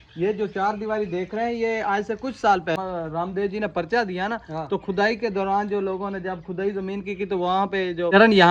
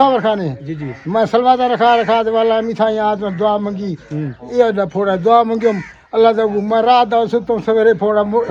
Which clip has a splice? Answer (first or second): first